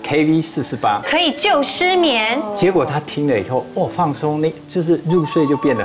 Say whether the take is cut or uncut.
uncut